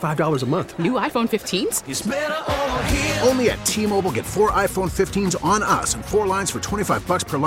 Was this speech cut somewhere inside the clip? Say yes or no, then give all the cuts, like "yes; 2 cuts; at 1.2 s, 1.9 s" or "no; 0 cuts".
no; 0 cuts